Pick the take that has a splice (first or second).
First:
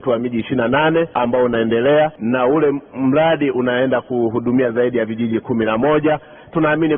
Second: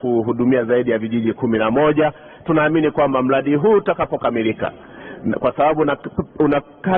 first